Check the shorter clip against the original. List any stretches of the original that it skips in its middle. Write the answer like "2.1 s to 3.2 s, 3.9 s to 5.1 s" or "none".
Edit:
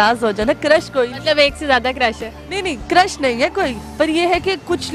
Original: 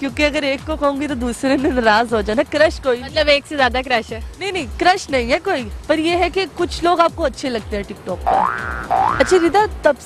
none